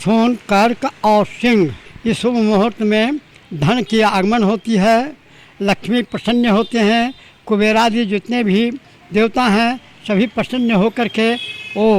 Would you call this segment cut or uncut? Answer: cut